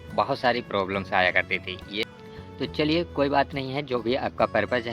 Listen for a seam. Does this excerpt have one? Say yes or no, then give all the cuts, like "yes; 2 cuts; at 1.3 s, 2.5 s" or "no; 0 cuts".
yes; 1 cut; at 2.1 s